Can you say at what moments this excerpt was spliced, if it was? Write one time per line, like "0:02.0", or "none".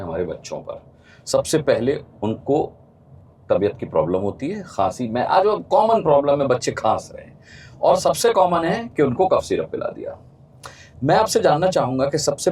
none